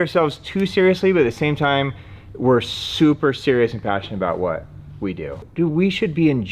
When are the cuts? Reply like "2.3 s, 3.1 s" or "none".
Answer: 5.4 s